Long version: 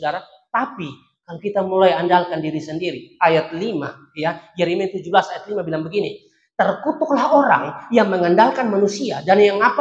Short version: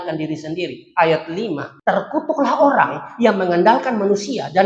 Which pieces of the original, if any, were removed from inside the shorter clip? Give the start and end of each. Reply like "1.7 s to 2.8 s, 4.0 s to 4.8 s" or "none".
3.9 s to 6.4 s